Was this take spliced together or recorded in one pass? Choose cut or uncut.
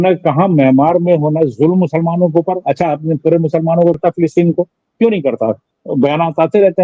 cut